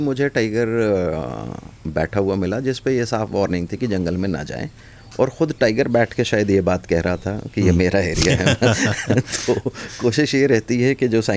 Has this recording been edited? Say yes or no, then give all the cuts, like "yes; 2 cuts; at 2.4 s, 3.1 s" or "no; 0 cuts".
no; 0 cuts